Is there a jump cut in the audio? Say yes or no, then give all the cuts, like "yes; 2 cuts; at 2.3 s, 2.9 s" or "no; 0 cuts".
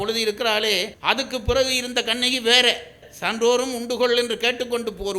yes; 2 cuts; at 0.9 s, 3.0 s